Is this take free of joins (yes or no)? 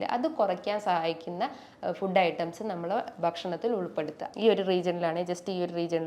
no